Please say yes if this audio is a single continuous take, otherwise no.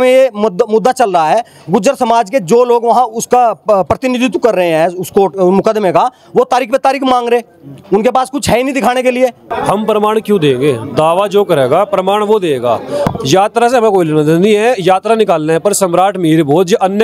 no